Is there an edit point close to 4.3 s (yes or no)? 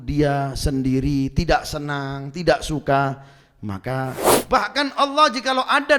yes